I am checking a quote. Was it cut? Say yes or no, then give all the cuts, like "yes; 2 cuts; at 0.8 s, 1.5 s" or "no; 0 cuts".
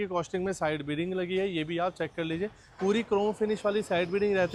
no; 0 cuts